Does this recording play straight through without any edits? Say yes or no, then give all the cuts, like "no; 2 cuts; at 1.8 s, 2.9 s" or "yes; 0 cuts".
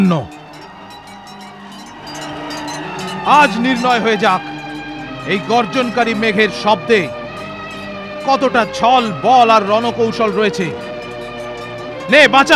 yes; 0 cuts